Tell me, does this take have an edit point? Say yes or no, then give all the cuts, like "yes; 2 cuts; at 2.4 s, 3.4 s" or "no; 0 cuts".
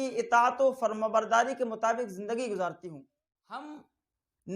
yes; 1 cut; at 3.6 s